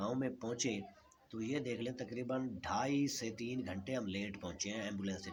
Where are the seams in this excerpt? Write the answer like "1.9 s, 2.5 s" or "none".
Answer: none